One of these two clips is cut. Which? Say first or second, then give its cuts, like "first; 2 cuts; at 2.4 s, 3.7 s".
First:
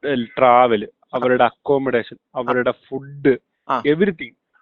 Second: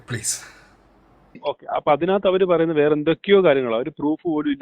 second; 1 cut; at 1.5 s